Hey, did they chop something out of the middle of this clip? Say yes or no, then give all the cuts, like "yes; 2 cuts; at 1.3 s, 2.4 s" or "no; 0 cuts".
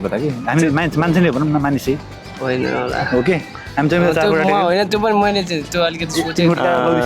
no; 0 cuts